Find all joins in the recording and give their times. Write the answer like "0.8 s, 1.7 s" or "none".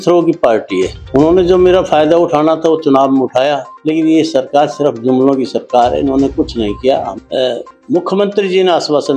1.0 s, 3.7 s, 7.1 s